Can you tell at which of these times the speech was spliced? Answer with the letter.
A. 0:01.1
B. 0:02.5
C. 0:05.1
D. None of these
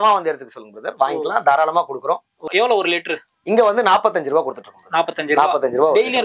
B